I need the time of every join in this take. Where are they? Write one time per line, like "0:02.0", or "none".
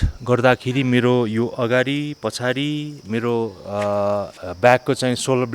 0:04.4